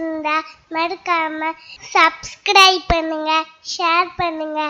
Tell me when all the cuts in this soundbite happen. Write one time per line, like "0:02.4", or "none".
none